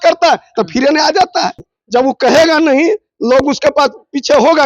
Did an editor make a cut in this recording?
yes; 1 cut; at 1.7 s

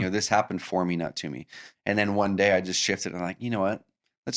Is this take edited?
yes; 1 cut; at 1.7 s

